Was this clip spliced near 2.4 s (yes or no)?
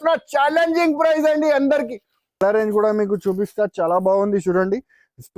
yes